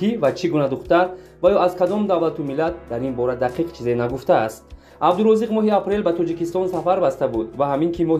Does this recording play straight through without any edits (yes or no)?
yes